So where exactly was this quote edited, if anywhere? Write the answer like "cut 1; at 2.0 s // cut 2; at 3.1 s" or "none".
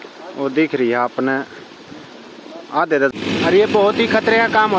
cut 1; at 3.1 s